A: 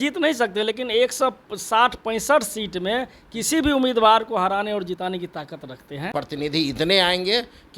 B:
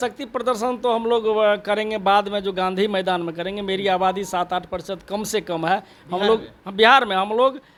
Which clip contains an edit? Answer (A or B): A